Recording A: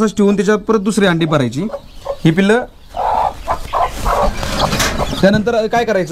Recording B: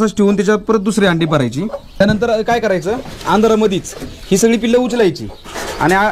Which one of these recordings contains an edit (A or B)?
B